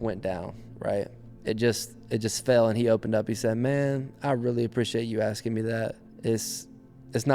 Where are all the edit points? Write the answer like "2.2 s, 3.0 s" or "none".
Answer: 1.2 s, 6.1 s